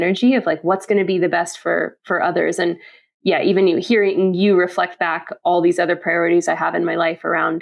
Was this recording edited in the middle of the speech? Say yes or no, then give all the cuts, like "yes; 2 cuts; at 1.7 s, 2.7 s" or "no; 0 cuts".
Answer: no; 0 cuts